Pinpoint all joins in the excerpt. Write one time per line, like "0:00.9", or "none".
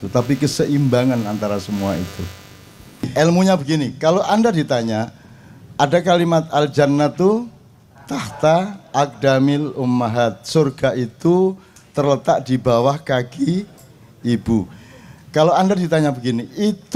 0:03.1